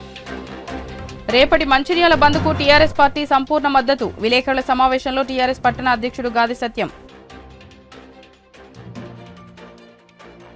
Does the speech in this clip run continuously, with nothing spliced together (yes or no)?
no